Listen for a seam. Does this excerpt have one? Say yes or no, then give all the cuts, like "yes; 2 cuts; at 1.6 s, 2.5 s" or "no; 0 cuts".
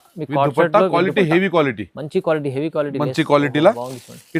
no; 0 cuts